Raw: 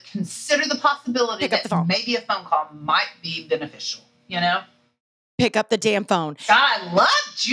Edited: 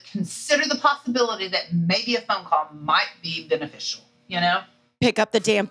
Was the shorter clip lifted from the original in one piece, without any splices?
no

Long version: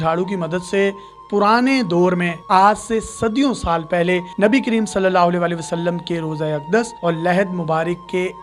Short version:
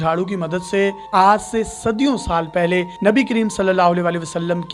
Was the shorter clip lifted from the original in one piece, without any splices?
no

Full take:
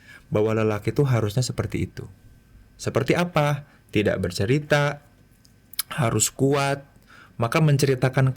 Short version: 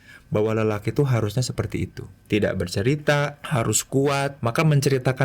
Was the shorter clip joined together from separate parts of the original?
yes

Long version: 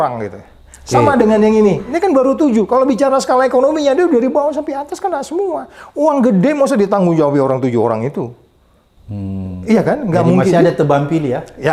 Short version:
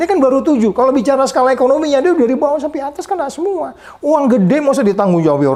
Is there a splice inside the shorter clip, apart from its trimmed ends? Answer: no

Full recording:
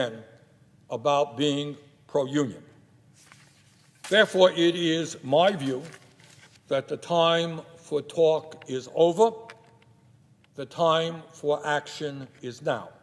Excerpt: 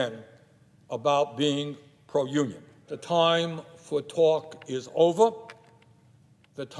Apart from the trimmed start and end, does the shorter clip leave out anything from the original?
yes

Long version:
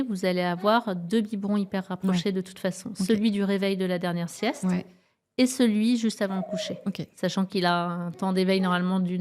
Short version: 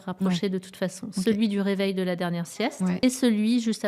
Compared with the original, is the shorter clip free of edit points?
no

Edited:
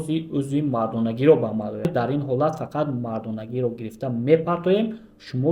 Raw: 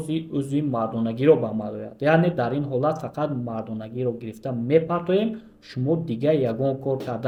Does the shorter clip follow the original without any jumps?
no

